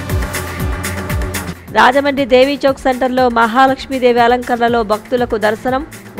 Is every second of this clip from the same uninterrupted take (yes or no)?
no